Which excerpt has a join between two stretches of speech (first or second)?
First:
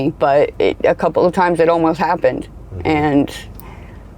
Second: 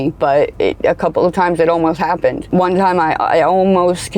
second